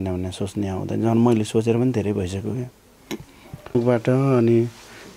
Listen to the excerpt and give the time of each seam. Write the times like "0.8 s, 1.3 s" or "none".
3.8 s